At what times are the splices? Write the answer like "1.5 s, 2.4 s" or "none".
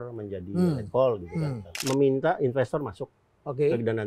1.7 s